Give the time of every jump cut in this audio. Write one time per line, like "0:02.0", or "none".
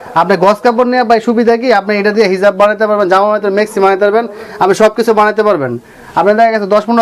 none

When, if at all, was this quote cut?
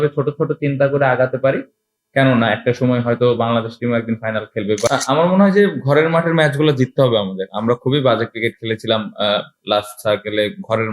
0:04.9

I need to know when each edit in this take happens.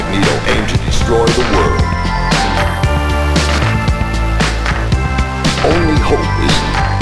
none

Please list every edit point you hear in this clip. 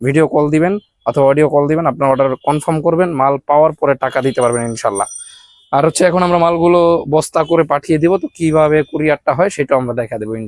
none

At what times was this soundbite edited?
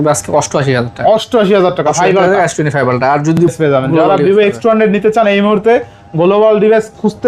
0:03.4

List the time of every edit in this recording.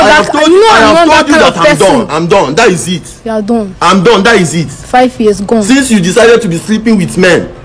none

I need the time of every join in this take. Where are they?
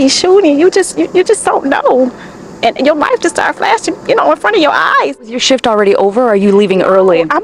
0:05.1

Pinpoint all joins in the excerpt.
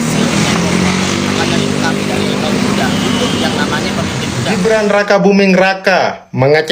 0:04.5

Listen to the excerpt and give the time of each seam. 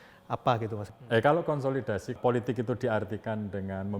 0:00.8
0:02.2

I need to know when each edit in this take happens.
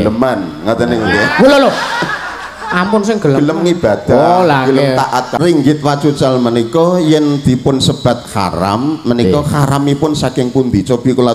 0:05.3

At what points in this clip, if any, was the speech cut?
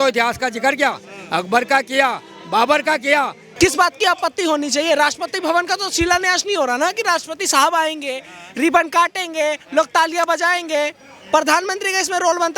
0:03.4

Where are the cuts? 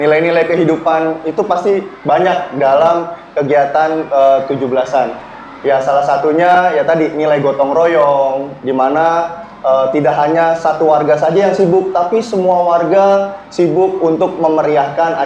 none

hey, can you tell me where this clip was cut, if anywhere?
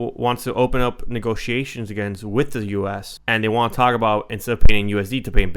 0:03.1

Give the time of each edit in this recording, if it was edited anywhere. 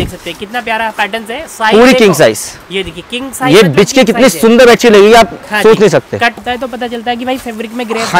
0:06.4

